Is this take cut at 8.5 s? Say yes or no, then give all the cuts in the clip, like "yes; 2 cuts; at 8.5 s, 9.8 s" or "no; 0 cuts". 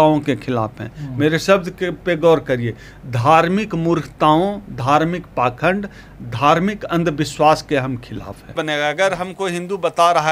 yes; 1 cut; at 8.5 s